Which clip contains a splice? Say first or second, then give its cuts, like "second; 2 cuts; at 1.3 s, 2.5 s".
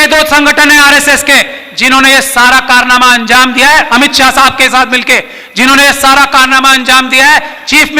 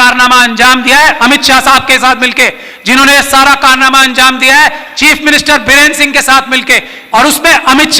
second; 1 cut; at 6.9 s